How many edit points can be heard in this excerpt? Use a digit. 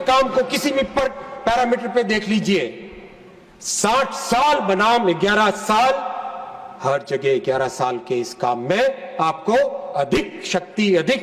0